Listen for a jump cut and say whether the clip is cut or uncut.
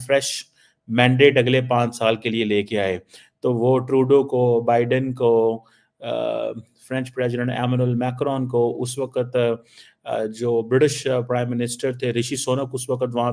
uncut